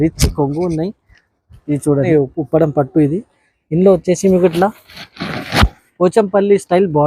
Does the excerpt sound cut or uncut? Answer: cut